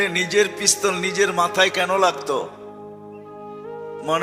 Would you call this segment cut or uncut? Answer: uncut